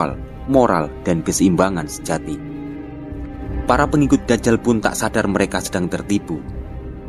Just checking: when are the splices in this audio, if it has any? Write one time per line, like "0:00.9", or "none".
0:03.5